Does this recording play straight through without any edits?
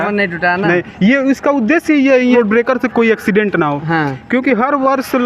no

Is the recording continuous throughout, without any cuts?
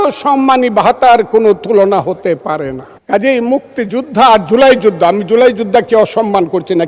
no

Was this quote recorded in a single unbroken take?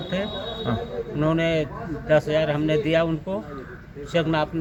yes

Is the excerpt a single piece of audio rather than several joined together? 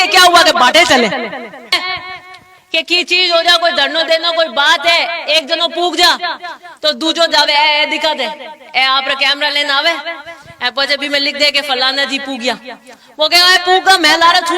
no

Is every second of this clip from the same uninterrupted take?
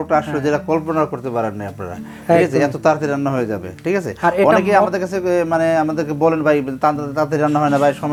yes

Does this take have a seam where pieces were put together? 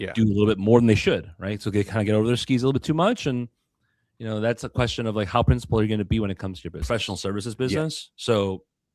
yes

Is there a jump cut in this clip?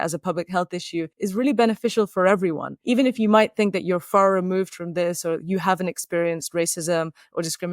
yes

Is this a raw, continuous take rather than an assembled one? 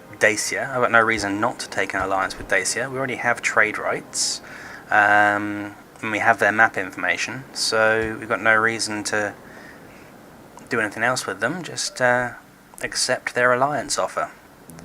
no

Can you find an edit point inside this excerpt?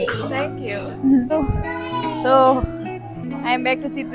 yes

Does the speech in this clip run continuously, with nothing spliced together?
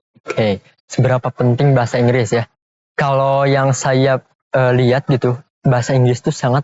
yes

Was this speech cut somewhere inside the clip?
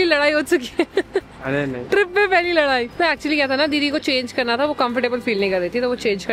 no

